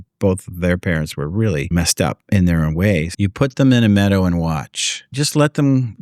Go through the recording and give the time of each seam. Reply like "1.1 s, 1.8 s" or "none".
1.7 s, 3.1 s, 5.1 s